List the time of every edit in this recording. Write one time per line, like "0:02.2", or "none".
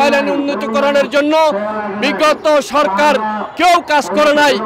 none